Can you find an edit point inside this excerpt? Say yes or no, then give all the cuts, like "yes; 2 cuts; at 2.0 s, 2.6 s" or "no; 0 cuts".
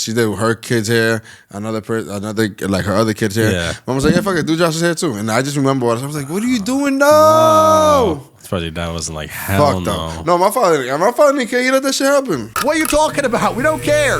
yes; 1 cut; at 12.5 s